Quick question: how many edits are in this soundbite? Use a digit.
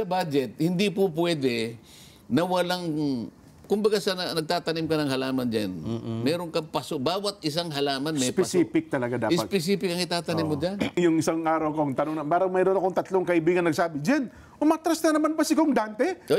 1